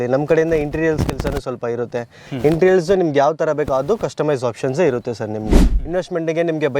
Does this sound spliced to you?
yes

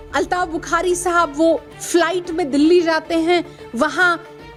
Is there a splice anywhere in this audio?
no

